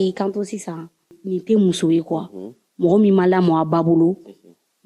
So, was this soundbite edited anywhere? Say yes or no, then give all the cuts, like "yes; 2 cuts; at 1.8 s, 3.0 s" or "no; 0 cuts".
yes; 1 cut; at 1.2 s